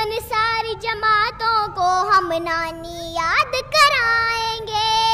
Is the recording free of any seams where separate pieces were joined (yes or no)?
yes